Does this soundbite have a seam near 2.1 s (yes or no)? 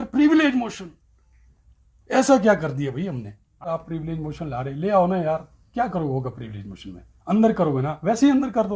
no